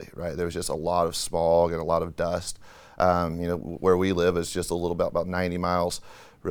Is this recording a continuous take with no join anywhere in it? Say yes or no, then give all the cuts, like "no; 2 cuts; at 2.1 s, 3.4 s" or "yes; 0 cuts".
yes; 0 cuts